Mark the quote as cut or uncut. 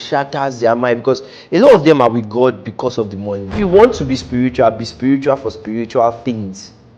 cut